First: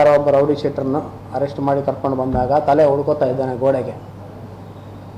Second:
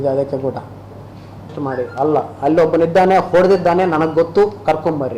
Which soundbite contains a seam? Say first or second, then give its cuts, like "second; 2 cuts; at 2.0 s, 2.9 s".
second; 1 cut; at 1.5 s